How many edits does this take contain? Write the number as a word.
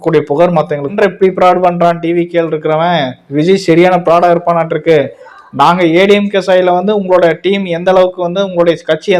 one